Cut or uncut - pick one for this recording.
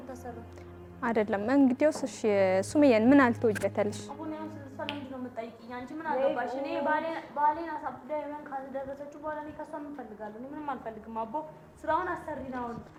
uncut